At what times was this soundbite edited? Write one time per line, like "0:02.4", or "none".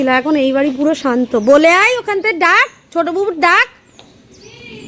none